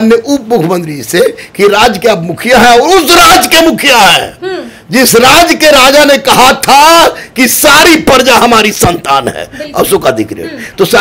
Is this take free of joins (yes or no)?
yes